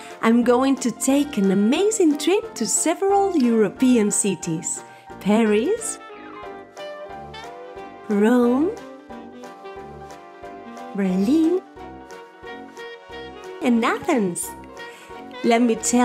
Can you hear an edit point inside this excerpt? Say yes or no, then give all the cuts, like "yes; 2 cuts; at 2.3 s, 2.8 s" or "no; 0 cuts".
yes; 2 cuts; at 9.2 s, 10.9 s